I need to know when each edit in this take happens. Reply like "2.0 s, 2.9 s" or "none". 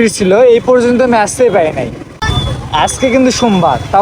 2.3 s

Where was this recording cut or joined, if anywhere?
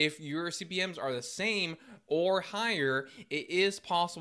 none

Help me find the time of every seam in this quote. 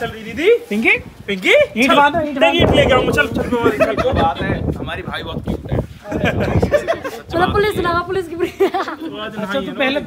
none

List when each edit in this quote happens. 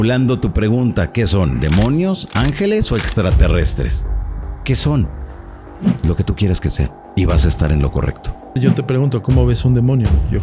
7.0 s, 8.6 s

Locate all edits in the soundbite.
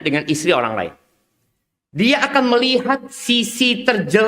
none

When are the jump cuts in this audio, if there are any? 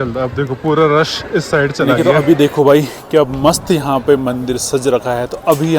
1.9 s

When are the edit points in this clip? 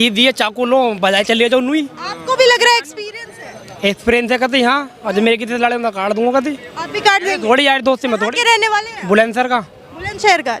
none

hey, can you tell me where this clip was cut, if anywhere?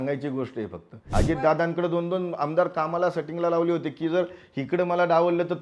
1.1 s

